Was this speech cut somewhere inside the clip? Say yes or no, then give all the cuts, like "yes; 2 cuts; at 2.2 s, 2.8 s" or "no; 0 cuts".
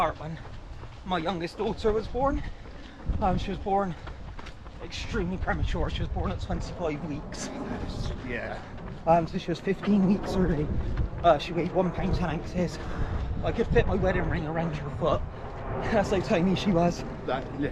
no; 0 cuts